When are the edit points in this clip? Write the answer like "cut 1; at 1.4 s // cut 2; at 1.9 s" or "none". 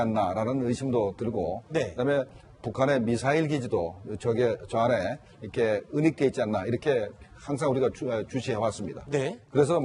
none